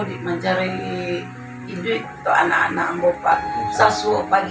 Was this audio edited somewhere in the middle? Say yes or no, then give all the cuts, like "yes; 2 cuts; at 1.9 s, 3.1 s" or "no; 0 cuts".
no; 0 cuts